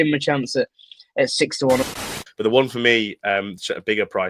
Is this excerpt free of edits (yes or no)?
no